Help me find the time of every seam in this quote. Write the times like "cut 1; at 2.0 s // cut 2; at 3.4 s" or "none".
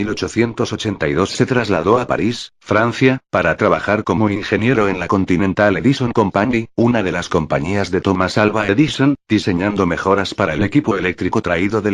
cut 1; at 0.9 s